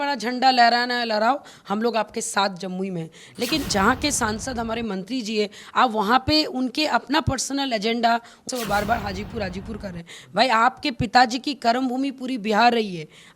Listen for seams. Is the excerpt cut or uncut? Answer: cut